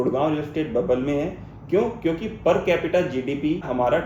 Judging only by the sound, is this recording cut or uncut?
uncut